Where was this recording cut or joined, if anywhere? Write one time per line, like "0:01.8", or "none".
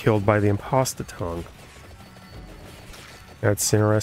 none